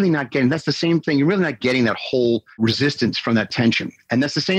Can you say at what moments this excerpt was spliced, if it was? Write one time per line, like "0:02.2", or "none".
none